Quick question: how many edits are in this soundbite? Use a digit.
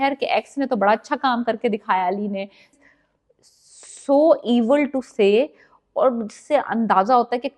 1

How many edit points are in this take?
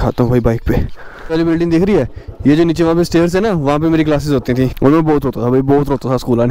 2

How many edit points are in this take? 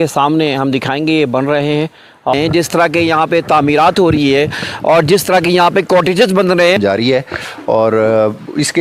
2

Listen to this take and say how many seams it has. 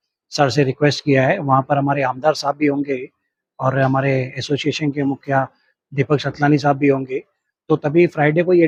0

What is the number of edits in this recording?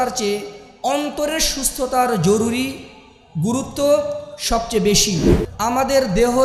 1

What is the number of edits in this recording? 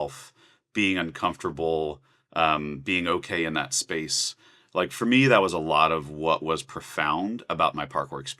0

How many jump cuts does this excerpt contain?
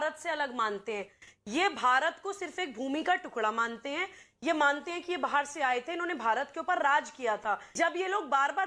1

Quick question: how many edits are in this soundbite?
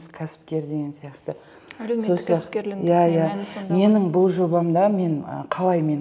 0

